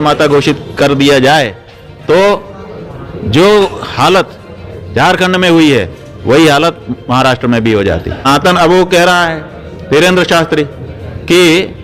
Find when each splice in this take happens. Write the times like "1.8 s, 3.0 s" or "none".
8.3 s